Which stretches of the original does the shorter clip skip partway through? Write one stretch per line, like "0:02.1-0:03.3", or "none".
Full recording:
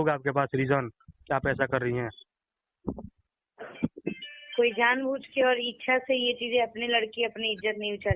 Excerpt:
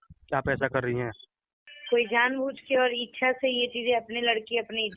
0:02.6-0:04.3

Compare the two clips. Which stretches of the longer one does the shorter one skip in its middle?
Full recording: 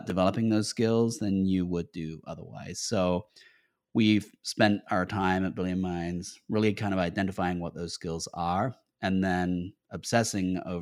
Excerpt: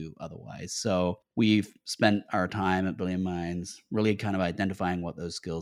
0:03.3-0:03.8

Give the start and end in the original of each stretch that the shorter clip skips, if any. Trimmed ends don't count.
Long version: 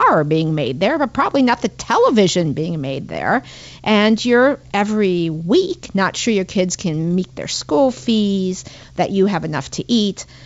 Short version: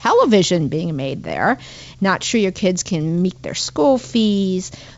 0:03.7-0:05.8

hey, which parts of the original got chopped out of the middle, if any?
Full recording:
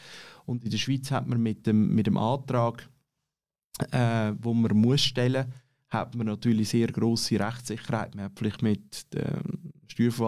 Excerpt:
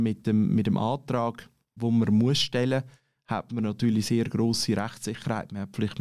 0:03.1-0:04.4

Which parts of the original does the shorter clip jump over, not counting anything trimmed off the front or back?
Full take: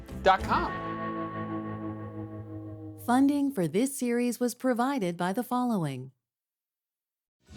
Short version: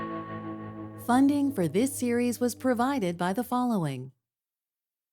0:02.0-0:03.0

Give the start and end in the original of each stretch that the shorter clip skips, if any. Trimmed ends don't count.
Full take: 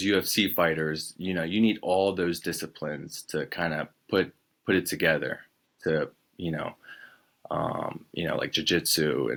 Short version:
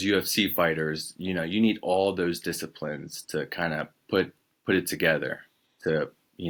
none

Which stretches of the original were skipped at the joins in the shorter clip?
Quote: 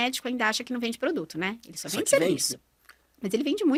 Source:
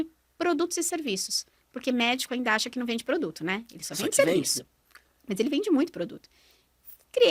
none

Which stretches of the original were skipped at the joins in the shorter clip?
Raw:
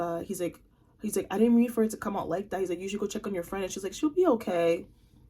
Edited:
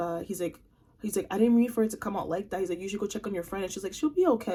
none

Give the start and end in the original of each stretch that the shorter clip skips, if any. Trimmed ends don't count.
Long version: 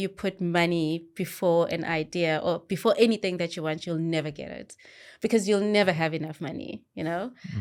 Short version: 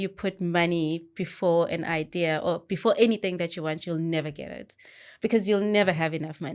none

